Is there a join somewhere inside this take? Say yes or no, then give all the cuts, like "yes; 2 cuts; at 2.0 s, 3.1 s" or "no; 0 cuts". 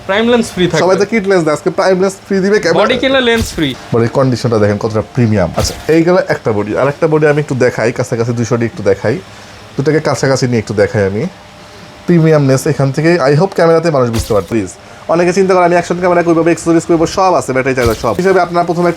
yes; 4 cuts; at 3.8 s, 5.5 s, 14.5 s, 18.2 s